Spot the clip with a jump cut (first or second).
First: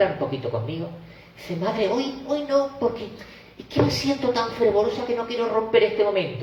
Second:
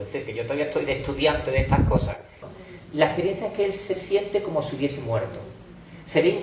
second